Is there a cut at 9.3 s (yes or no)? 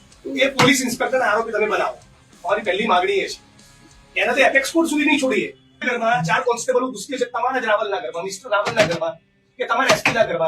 no